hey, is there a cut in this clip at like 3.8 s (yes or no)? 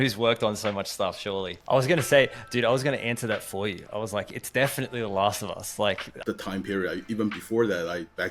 no